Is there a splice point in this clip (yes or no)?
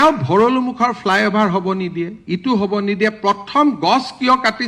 no